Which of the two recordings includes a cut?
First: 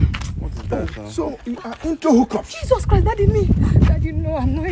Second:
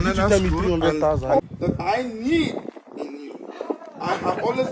second; 1 cut; at 1.4 s

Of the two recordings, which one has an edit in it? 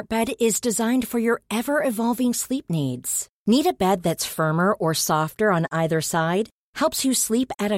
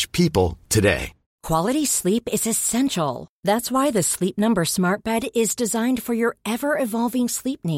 second; 1 cut; at 1.3 s

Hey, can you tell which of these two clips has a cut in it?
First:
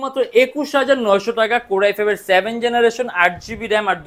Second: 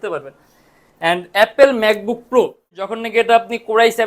second; 1 cut; at 3.0 s

